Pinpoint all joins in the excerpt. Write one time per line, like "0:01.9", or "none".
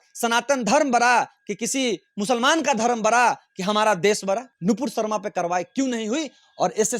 0:04.5